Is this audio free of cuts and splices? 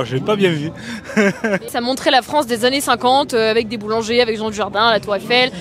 yes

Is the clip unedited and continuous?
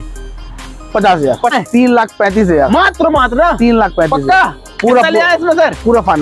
no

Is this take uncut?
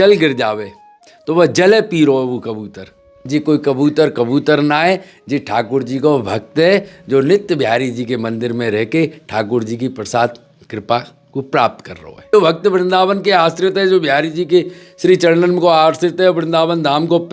no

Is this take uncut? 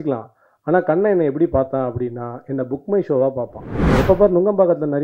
no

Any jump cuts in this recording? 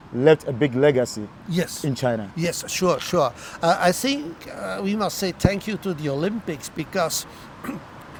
no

